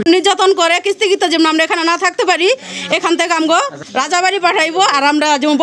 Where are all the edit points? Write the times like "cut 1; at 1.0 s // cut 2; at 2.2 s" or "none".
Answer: none